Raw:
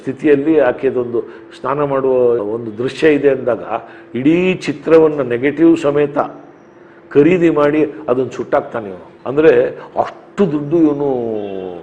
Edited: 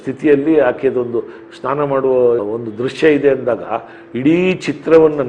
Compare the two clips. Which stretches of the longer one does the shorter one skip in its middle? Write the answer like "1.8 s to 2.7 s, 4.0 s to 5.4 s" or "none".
none

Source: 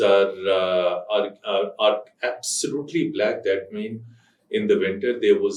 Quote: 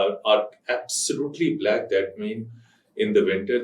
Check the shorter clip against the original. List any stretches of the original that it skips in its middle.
none

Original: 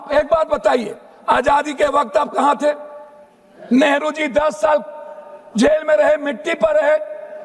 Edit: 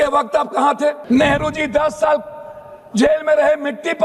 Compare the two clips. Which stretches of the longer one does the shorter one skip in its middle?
2.8 s to 3.6 s

